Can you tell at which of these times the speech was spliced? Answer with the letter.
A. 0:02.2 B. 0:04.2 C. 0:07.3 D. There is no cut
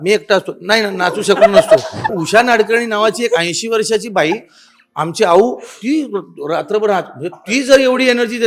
A